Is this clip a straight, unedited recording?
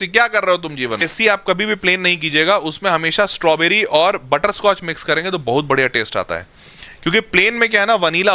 no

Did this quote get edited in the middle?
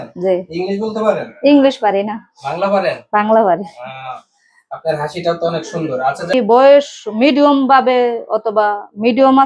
yes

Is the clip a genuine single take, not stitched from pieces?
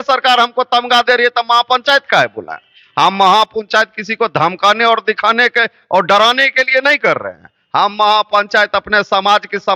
yes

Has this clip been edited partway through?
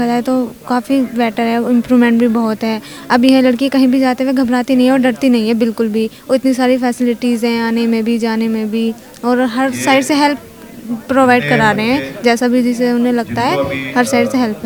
no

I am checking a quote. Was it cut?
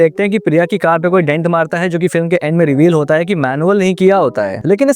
no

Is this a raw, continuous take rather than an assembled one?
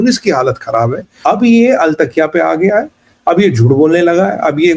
no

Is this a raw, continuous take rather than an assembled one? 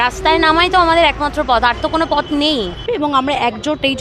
no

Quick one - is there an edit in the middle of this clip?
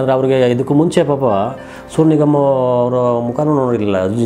no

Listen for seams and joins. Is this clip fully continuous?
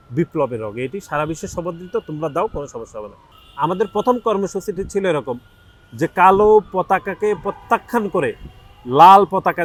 yes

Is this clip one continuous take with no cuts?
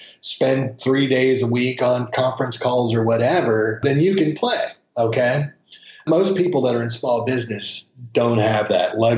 yes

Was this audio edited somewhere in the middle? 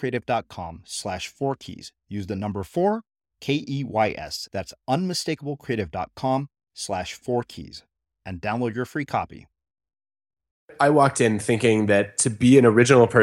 yes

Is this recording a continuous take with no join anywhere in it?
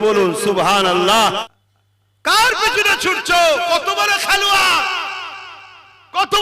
no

